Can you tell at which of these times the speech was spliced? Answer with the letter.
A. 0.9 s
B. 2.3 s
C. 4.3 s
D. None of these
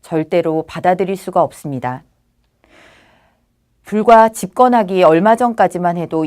B